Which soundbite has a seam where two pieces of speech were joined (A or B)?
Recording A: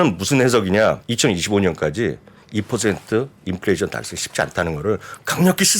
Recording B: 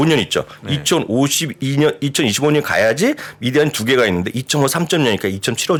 A